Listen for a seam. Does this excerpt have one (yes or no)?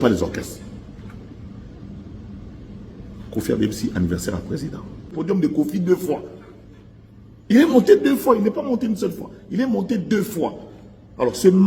yes